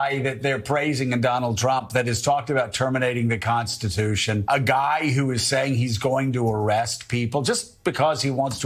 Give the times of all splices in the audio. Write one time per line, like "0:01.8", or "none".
0:04.4